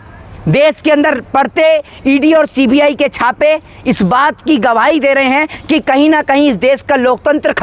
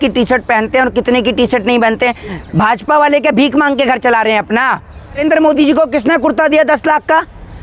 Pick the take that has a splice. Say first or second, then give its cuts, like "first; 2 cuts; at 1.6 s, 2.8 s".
second; 1 cut; at 5.2 s